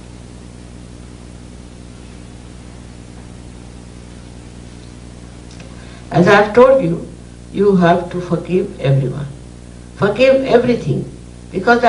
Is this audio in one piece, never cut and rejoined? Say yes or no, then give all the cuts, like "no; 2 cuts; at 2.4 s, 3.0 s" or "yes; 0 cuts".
no; 1 cut; at 3.2 s